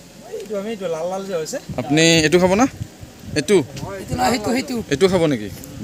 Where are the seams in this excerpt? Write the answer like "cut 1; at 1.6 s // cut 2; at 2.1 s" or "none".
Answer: none